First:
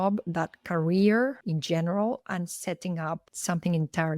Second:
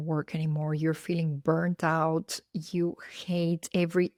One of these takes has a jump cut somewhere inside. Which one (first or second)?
first